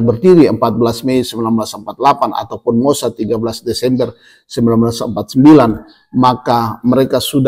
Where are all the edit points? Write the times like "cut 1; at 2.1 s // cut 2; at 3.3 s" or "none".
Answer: none